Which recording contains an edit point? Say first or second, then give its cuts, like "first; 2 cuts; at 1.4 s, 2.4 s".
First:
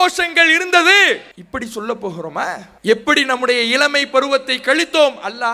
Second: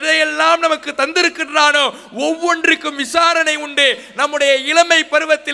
first; 2 cuts; at 1.3 s, 2.7 s